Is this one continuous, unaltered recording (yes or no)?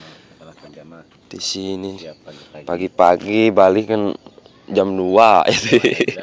yes